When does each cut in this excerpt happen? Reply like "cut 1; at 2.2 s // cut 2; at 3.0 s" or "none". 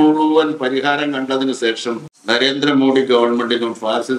cut 1; at 2.1 s